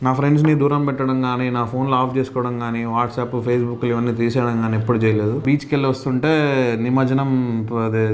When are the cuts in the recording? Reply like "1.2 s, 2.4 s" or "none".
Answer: 5.4 s